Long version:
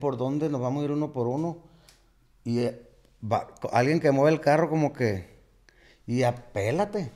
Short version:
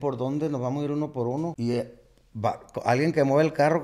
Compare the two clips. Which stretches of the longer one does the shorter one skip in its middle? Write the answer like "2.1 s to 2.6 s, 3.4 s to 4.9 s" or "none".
1.6 s to 2.4 s

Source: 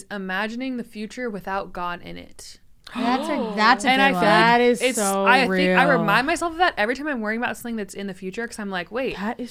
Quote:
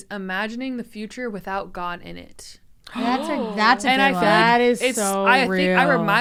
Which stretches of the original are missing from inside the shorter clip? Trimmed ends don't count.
none

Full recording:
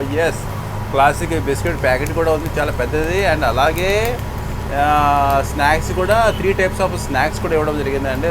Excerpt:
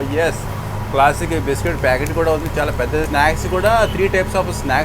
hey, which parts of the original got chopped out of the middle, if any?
3.1 s to 5.5 s

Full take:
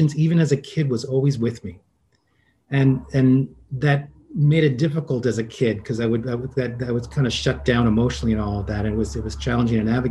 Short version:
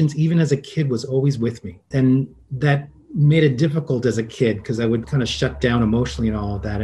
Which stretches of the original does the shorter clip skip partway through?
1.8 s to 3.0 s, 6.2 s to 7.1 s

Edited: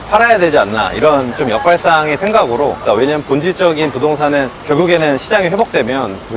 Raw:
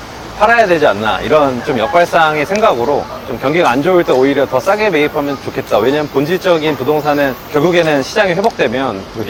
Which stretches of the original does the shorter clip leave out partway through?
3.1 s to 5.6 s

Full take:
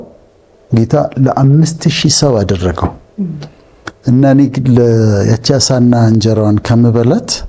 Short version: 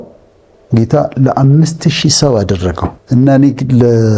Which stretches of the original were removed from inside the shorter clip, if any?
2.9 s to 3.9 s

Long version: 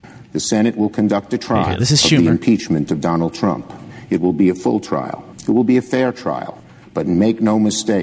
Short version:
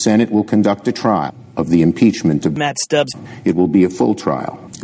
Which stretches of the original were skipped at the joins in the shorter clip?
3.4 s to 3.6 s

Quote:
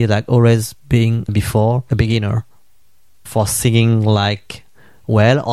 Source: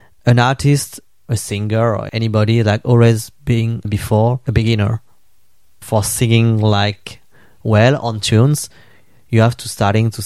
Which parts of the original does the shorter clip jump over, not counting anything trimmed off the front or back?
none

